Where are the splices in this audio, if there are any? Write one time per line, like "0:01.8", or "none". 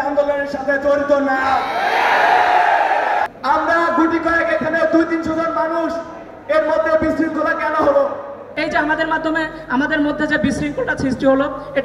0:03.3
0:08.4